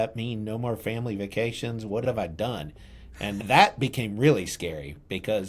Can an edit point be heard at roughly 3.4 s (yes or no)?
yes